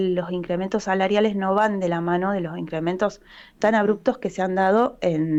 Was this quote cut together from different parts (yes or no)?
no